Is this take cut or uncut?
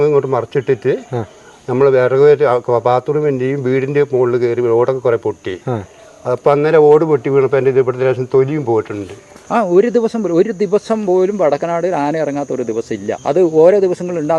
cut